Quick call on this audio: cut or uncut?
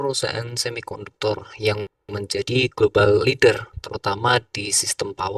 uncut